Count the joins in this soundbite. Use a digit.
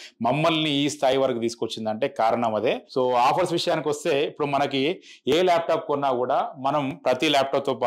1